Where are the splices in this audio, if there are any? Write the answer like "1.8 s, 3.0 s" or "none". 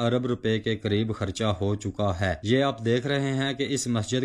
2.4 s